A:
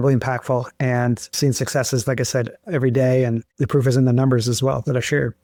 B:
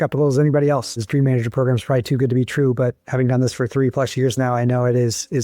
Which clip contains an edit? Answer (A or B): B